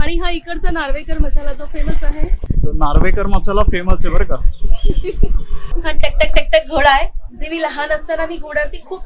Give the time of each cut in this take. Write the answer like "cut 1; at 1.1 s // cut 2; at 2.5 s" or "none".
cut 1; at 5.5 s